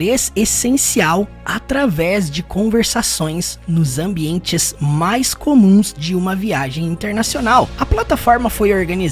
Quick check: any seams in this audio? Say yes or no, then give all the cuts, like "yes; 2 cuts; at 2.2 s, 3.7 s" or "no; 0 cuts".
yes; 1 cut; at 7.7 s